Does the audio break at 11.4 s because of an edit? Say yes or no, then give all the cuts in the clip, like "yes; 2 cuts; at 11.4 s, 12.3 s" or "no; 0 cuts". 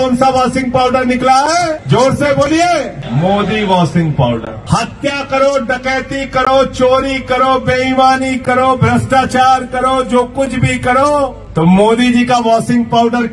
yes; 4 cuts; at 1.8 s, 3.0 s, 4.5 s, 11.4 s